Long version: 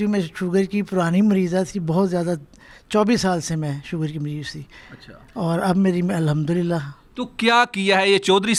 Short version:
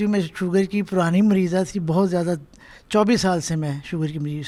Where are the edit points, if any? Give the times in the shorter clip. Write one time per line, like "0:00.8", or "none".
none